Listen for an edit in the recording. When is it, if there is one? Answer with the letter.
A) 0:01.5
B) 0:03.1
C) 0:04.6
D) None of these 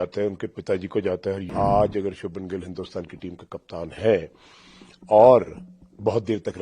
A